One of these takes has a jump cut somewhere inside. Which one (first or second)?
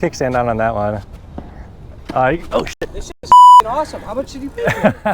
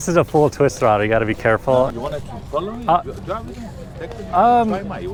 first